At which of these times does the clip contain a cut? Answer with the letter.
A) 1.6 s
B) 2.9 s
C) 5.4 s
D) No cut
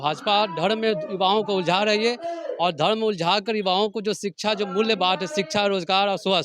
D